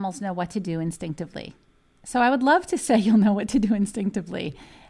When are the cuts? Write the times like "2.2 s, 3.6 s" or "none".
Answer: none